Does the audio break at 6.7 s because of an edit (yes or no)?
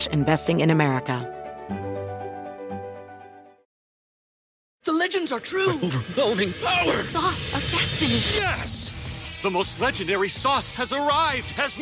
no